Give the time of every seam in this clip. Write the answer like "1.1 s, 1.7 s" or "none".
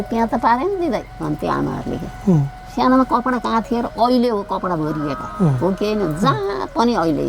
2.6 s